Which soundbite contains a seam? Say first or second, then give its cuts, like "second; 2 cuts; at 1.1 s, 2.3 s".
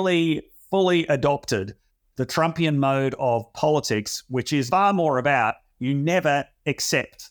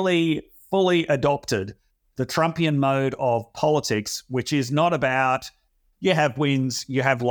first; 1 cut; at 4.7 s